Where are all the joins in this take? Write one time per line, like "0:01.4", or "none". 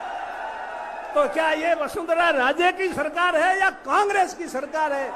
none